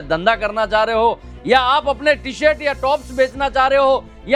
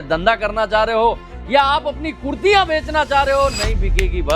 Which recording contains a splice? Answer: second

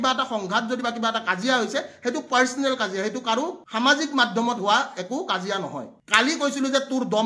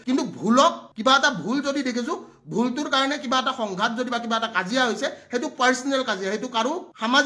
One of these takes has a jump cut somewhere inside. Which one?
first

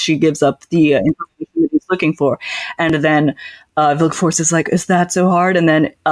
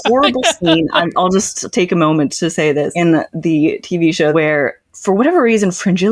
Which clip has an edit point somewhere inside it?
second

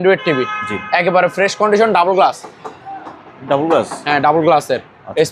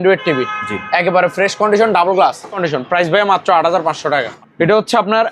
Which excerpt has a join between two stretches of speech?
second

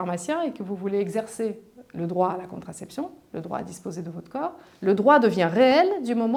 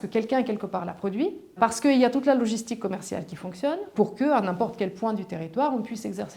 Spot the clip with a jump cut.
second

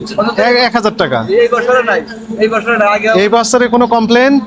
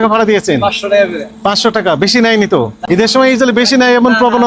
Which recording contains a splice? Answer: second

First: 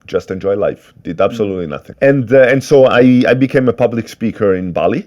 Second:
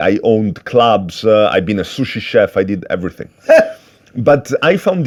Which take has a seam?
first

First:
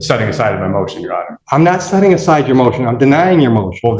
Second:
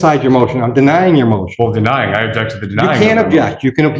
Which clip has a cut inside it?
first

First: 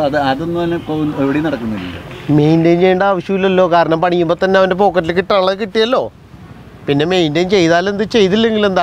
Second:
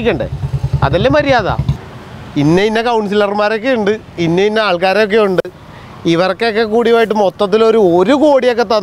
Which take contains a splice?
second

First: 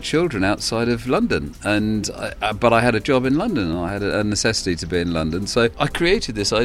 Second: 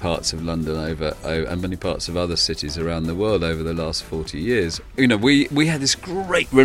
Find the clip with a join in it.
first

